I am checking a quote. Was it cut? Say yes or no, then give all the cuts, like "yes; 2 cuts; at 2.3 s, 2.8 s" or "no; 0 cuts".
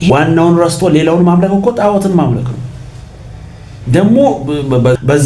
no; 0 cuts